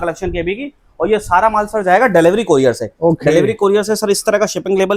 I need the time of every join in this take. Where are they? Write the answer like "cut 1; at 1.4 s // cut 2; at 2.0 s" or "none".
none